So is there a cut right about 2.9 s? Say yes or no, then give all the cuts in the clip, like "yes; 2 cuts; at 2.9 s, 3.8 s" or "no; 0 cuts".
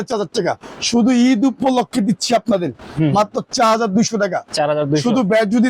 yes; 1 cut; at 2.9 s